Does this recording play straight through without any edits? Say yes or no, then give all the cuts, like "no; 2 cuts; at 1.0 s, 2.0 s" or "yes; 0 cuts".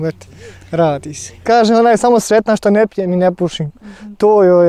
no; 1 cut; at 1.4 s